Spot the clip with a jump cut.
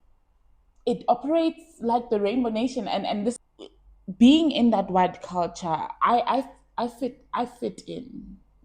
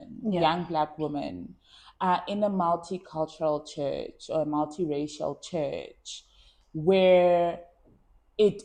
first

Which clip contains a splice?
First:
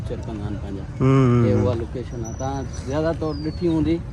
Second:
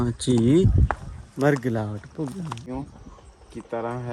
second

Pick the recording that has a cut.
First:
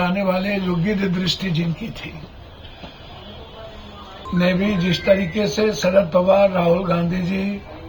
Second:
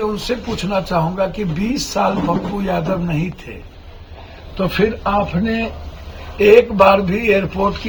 first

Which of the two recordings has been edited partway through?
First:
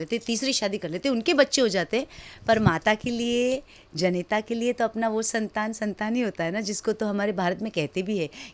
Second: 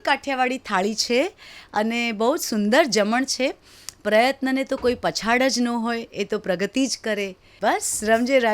second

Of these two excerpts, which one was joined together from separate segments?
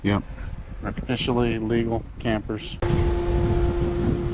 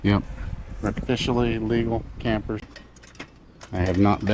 second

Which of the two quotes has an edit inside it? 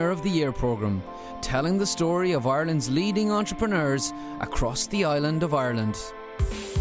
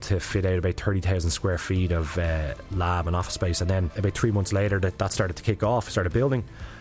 second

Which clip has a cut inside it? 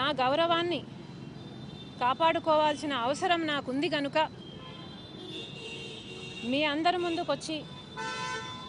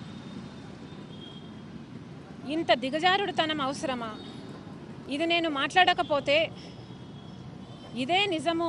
second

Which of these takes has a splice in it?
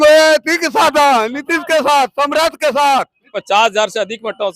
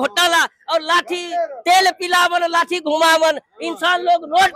first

